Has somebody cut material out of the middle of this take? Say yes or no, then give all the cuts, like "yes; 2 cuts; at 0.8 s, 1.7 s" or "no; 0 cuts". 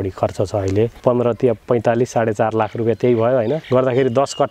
yes; 2 cuts; at 1.0 s, 3.6 s